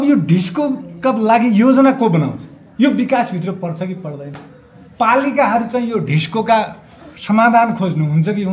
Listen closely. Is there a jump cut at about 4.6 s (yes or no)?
no